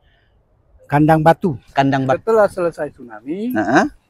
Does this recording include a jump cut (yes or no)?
yes